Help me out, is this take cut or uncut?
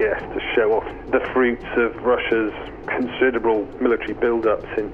cut